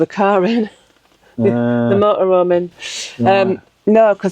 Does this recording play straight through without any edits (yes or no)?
yes